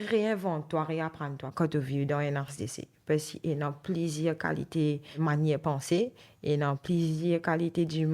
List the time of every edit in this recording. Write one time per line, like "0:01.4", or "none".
0:01.5
0:05.1